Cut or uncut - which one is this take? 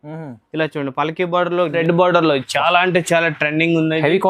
cut